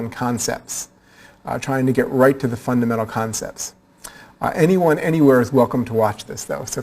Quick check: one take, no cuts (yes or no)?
no